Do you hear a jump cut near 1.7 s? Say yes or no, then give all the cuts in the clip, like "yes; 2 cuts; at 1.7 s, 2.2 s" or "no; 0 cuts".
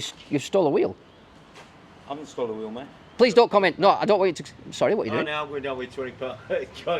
no; 1 cut; at 3.1 s